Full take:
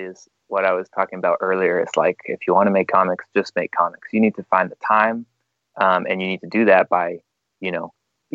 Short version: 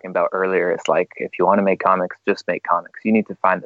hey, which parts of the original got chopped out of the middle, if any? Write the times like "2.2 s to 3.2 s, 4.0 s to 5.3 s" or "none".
none